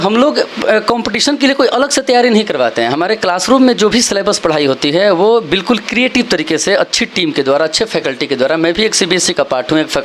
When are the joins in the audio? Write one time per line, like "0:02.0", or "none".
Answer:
none